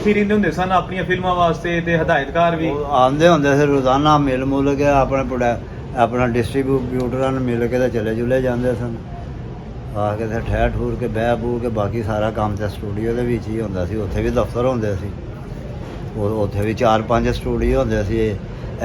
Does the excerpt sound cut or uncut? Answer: uncut